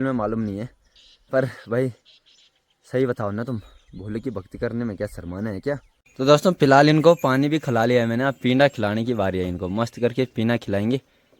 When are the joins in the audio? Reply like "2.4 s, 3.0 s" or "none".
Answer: 6.0 s